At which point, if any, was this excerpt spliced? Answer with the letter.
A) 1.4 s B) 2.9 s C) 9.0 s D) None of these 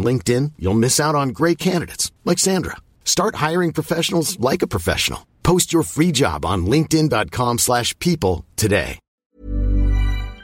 C